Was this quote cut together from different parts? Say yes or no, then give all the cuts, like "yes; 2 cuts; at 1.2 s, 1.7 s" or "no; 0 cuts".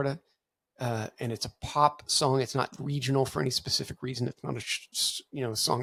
no; 0 cuts